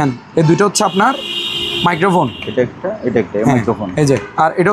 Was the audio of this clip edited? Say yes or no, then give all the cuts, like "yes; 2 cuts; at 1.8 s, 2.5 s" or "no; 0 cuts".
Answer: no; 0 cuts